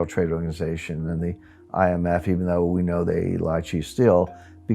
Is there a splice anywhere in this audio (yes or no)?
no